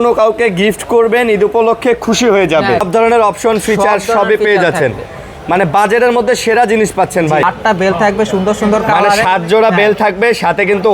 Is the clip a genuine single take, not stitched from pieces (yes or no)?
no